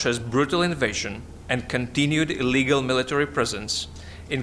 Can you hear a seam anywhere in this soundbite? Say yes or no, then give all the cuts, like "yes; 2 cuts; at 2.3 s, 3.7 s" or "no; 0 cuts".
no; 0 cuts